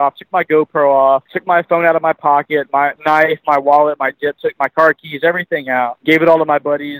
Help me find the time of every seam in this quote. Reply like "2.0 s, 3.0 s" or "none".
1.3 s, 3.0 s, 6.0 s